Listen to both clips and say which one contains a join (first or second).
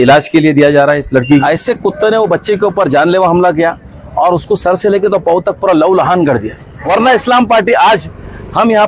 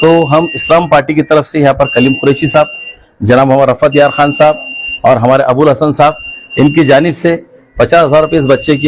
first